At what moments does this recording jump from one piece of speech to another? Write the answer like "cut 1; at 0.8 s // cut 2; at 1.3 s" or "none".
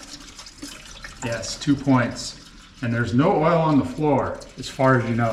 none